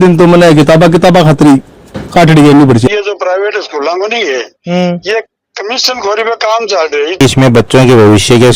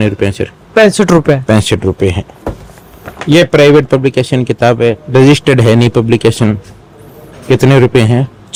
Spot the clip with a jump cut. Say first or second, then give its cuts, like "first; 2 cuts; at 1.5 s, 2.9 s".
first; 2 cuts; at 2.9 s, 7.2 s